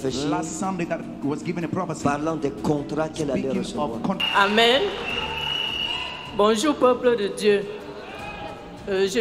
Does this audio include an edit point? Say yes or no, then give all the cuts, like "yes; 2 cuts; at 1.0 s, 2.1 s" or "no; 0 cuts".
yes; 1 cut; at 4.2 s